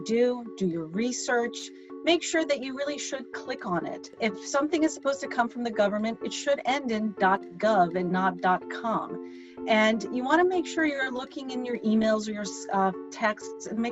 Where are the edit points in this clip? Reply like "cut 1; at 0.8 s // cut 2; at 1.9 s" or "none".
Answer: cut 1; at 4.1 s